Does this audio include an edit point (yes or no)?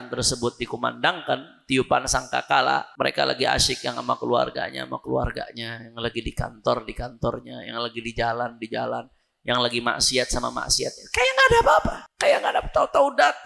yes